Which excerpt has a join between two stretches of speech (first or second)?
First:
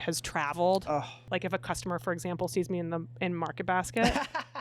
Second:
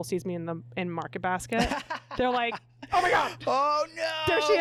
first